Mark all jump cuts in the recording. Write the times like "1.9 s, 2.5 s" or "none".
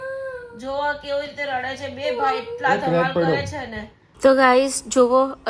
4.2 s